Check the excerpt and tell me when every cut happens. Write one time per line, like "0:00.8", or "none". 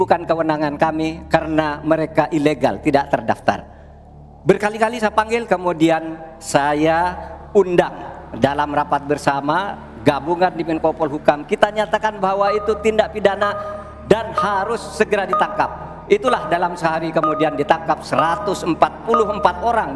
none